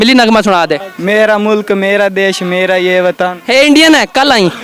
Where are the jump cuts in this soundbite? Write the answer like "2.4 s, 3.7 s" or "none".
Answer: 0.9 s